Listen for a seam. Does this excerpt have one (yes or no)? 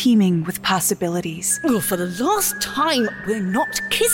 yes